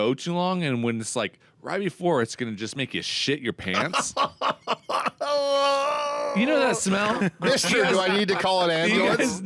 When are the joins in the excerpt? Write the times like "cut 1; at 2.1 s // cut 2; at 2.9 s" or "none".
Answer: none

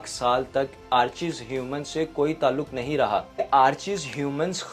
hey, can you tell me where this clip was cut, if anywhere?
cut 1; at 3.4 s

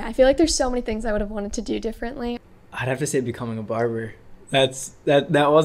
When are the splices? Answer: cut 1; at 2.4 s

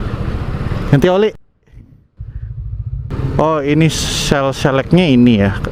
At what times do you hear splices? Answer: none

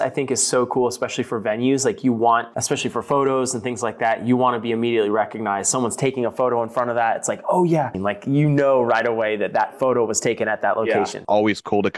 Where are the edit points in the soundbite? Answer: cut 1; at 2.5 s // cut 2; at 8.0 s // cut 3; at 11.2 s

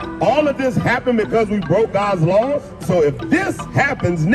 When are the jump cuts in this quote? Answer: cut 1; at 2.8 s

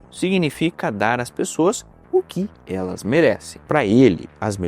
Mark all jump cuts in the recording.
cut 1; at 3.5 s

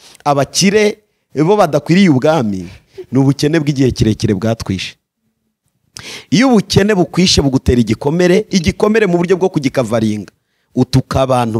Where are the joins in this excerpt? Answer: none

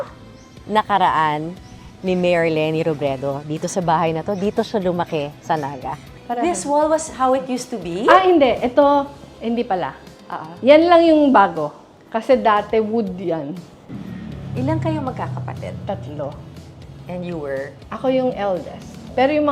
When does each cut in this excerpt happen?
cut 1; at 6.1 s

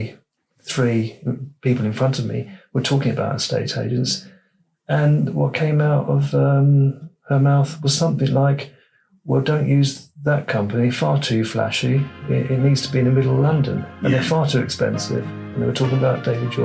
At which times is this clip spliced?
none

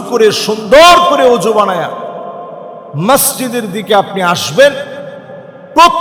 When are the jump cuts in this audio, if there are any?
none

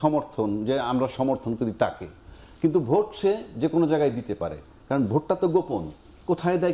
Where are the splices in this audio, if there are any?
none

